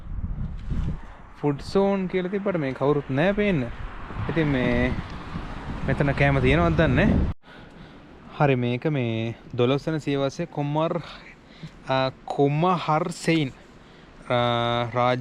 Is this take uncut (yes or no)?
no